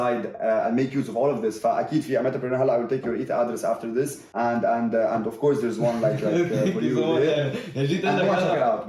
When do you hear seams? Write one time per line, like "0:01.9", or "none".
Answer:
0:04.2